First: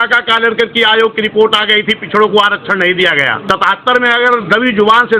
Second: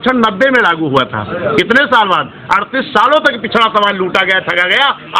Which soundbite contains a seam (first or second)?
first